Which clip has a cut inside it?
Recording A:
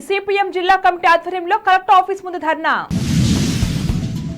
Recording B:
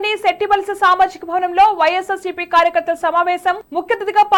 A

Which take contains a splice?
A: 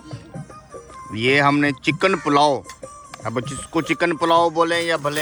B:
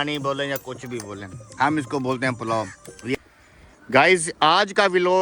B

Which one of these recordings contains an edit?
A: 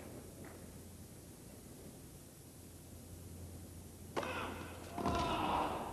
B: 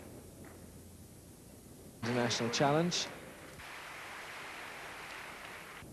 A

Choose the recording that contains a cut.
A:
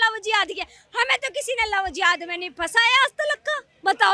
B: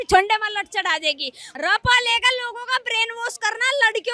B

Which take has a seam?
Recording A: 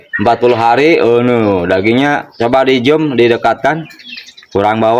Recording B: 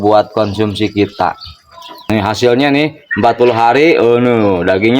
B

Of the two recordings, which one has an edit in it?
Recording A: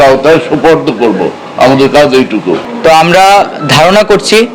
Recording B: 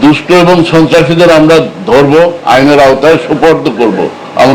A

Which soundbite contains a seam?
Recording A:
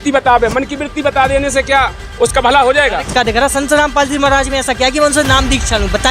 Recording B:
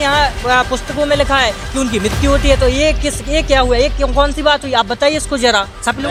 A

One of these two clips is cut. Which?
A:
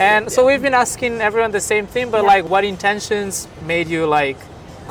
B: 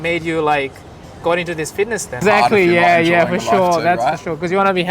B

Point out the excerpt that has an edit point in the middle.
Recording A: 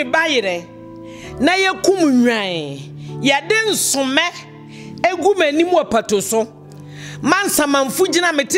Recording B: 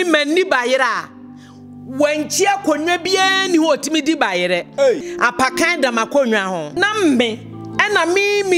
B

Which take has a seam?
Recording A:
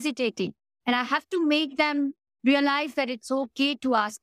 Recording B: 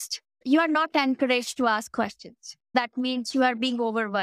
B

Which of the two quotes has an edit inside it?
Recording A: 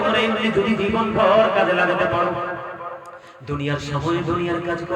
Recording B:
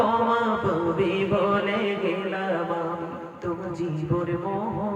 B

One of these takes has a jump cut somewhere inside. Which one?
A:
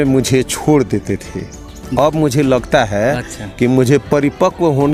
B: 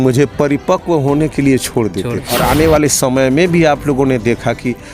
B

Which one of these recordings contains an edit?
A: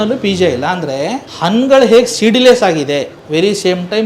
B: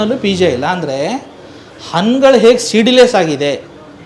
A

